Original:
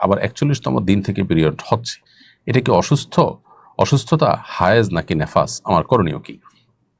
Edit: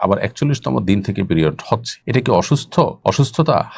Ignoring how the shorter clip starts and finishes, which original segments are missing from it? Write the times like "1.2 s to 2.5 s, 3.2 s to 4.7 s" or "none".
2.0 s to 2.3 s, 3.4 s to 3.7 s